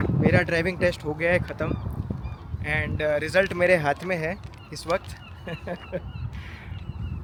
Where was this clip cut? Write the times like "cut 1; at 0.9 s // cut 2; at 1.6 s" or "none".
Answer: none